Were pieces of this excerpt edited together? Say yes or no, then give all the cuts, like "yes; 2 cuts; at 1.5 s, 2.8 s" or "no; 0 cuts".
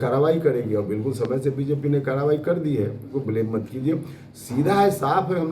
yes; 1 cut; at 3.1 s